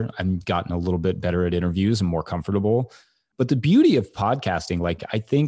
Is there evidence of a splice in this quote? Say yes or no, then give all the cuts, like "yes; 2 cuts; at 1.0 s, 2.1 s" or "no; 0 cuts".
no; 0 cuts